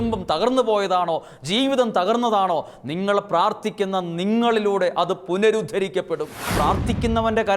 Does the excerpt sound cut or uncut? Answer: cut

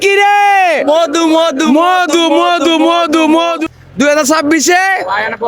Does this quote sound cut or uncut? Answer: cut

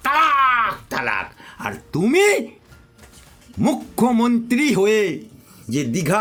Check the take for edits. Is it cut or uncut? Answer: uncut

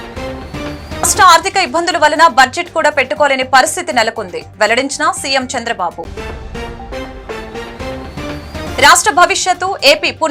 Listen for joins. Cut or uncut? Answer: uncut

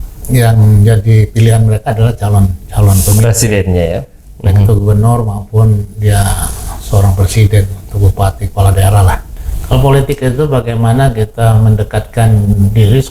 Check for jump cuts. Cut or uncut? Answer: cut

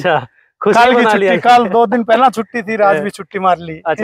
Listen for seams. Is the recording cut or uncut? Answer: uncut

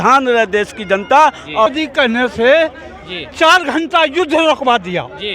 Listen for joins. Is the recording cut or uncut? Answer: cut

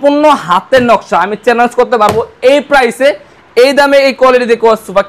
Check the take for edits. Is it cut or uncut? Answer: uncut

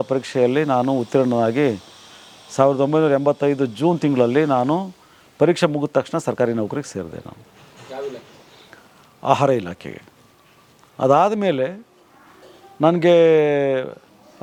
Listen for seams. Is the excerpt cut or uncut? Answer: uncut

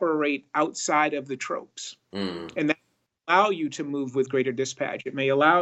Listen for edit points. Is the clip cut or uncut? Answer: uncut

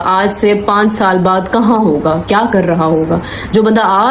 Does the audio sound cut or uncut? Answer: uncut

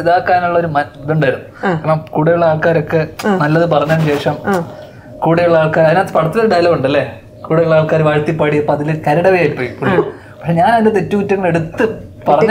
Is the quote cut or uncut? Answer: uncut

